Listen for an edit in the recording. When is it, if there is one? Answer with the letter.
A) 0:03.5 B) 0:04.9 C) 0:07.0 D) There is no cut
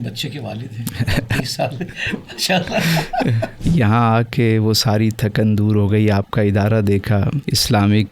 A